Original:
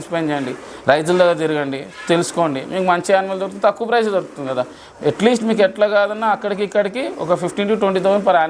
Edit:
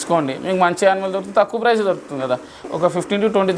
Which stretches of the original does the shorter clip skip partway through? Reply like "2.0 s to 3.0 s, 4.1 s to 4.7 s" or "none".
4.9 s to 7.1 s